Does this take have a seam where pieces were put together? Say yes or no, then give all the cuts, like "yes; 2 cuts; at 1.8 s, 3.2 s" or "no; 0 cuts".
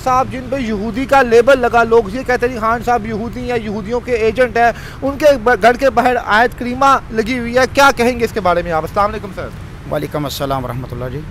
no; 0 cuts